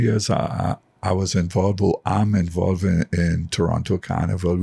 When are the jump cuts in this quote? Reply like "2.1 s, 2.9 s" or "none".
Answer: none